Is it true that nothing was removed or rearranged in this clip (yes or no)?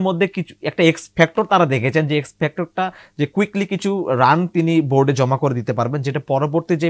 yes